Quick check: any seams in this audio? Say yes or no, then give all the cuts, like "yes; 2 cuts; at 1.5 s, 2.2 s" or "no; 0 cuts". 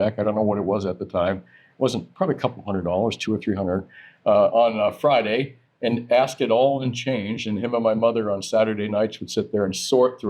no; 0 cuts